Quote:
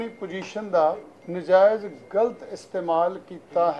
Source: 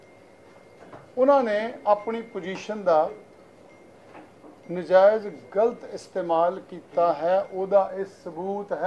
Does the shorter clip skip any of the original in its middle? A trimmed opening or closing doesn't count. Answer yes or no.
yes